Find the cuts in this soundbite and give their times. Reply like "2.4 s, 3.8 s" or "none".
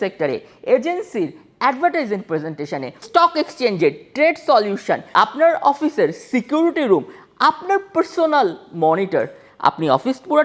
3.1 s, 5.0 s